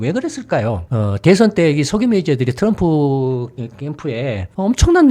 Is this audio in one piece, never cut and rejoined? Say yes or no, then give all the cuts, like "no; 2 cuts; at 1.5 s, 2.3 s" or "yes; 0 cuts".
yes; 0 cuts